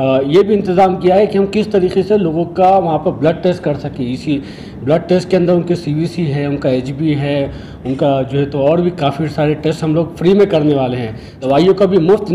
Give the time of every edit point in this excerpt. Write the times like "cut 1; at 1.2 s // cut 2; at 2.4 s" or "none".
cut 1; at 11.4 s